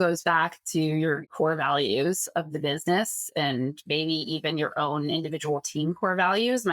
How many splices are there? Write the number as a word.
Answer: one